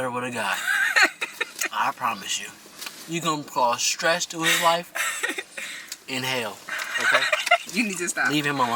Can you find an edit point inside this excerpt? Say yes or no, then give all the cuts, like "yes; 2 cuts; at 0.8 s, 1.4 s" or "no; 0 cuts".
no; 0 cuts